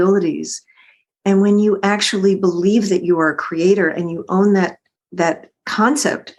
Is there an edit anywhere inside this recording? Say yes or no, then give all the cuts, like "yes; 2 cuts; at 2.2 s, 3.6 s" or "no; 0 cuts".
no; 0 cuts